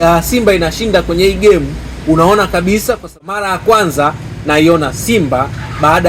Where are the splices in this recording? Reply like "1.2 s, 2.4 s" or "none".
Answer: 3.0 s